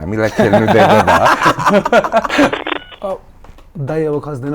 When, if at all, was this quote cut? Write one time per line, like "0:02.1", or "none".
0:02.5